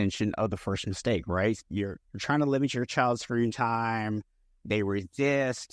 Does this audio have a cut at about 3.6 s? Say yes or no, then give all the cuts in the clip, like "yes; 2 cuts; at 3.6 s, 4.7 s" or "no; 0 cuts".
no; 1 cut; at 1.6 s